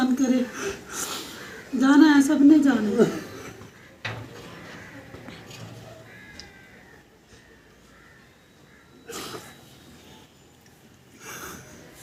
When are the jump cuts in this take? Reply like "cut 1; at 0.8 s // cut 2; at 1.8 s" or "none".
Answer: none